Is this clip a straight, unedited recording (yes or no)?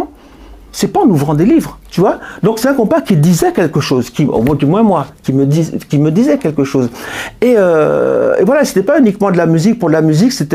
yes